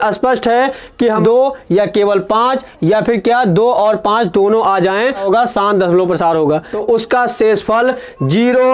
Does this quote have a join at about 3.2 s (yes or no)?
no